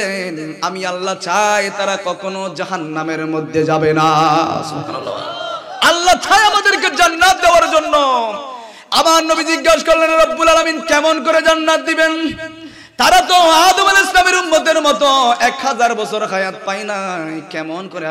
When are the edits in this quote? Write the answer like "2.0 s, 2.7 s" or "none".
none